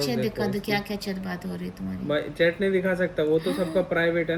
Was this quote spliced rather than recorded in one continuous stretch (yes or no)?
no